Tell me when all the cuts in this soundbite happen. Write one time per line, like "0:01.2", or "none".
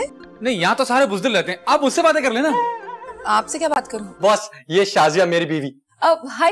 0:04.1